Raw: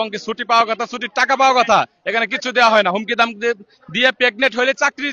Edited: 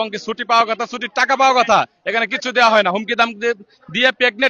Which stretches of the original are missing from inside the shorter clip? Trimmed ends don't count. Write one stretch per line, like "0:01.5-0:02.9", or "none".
none